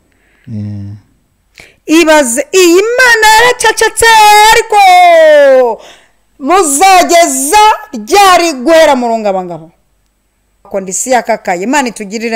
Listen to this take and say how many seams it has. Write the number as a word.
one